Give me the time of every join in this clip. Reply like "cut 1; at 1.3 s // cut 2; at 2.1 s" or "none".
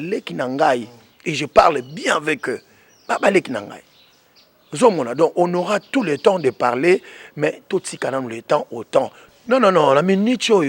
cut 1; at 9.2 s

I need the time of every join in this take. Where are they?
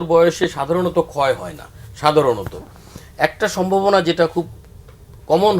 none

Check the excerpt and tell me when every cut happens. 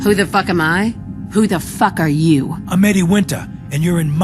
none

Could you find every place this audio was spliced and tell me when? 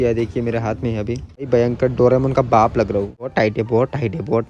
cut 1; at 1.5 s // cut 2; at 3.3 s

